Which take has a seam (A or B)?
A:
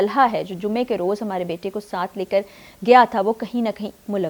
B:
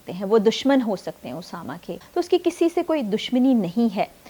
B